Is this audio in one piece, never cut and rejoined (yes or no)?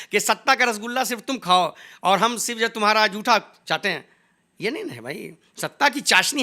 yes